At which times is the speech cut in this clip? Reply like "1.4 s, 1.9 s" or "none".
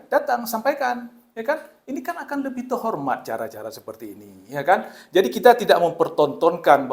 none